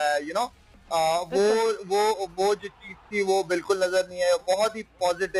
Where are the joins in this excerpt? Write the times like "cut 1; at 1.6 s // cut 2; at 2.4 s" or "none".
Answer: none